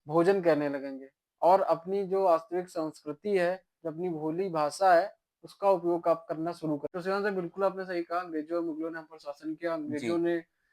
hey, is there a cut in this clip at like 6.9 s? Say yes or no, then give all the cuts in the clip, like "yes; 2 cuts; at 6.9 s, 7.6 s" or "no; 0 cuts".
yes; 1 cut; at 6.9 s